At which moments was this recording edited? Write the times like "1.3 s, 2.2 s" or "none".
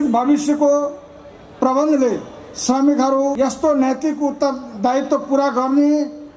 3.3 s